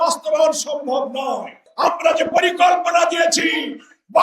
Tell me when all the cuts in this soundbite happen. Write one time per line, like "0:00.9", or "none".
0:01.7